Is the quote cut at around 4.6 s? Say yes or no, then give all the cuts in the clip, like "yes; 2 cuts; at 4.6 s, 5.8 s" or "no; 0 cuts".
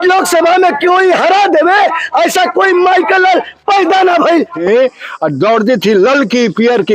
yes; 1 cut; at 4.6 s